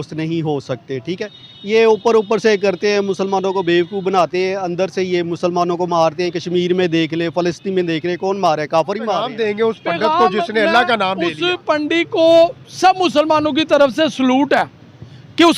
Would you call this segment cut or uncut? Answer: cut